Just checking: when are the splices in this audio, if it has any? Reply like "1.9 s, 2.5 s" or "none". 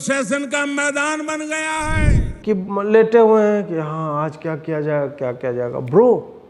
2.3 s